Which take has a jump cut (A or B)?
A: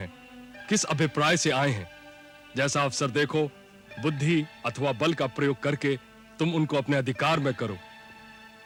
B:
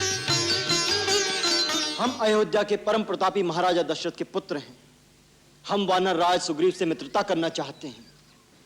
B